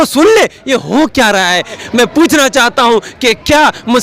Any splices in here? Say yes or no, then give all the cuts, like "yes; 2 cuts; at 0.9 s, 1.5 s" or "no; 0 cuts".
yes; 1 cut; at 1.8 s